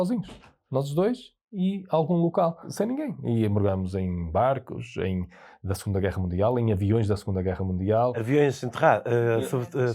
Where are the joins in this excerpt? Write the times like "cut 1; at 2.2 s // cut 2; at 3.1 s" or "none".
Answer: cut 1; at 2.6 s